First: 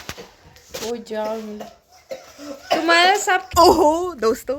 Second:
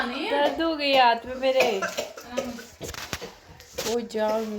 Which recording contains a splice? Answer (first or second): first